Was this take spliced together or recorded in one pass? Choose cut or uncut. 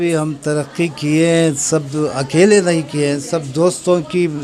uncut